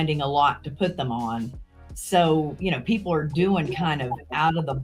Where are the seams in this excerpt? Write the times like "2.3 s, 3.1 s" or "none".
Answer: none